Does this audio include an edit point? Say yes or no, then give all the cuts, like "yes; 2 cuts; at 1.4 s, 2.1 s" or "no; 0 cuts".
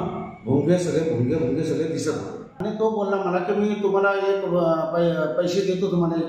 yes; 1 cut; at 2.6 s